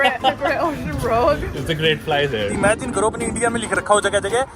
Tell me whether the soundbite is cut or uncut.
cut